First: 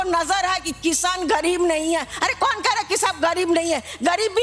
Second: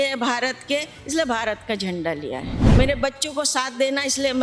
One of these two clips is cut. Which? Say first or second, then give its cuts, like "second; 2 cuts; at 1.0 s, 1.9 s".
second; 1 cut; at 2.6 s